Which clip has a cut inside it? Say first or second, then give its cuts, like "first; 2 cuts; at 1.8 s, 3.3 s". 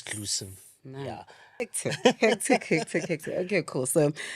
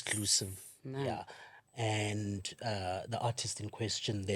first; 1 cut; at 1.6 s